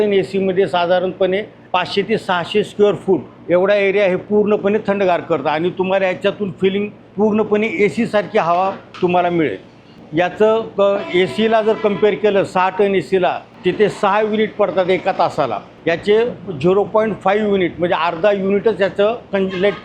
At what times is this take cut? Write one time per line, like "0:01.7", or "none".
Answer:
0:01.5
0:03.3
0:07.0
0:08.8
0:09.9
0:13.5
0:15.7